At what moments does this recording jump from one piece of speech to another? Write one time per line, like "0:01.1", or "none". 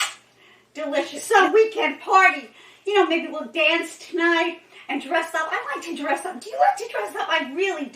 0:01.2